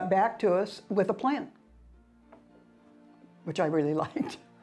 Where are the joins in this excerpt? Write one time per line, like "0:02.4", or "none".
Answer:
none